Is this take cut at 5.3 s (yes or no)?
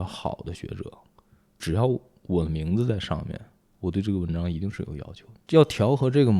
yes